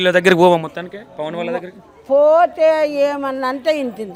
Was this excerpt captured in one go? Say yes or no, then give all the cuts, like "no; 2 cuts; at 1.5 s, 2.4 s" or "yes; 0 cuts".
yes; 0 cuts